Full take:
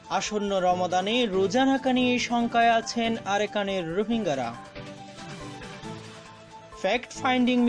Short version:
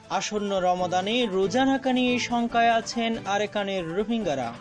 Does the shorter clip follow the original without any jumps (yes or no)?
yes